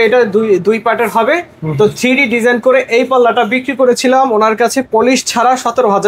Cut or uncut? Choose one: uncut